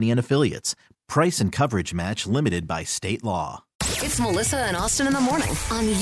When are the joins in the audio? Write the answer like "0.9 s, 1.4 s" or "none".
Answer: 3.7 s